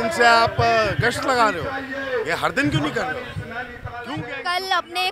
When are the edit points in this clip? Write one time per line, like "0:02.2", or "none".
none